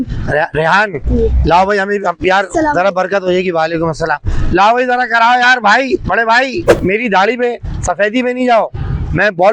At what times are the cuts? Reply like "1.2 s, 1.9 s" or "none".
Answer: 6.8 s

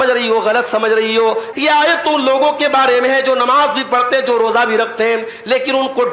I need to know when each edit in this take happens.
1.5 s

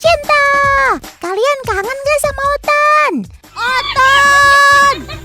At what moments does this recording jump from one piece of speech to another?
3.6 s

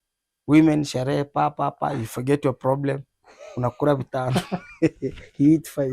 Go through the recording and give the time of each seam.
none

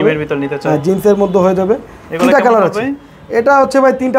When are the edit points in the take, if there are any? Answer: none

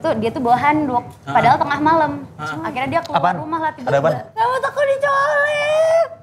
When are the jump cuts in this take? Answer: 4.3 s

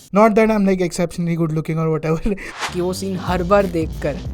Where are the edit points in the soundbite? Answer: 2.6 s

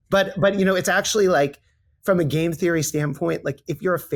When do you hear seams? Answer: none

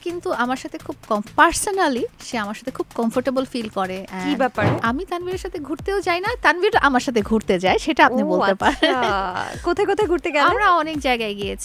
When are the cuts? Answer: 4.8 s

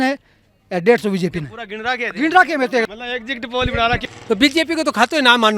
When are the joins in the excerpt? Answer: 2.9 s, 4.0 s

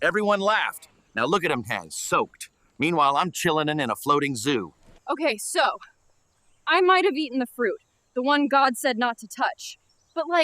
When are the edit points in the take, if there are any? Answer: 4.9 s

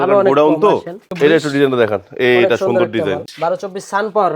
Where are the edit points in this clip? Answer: 1.0 s, 3.3 s

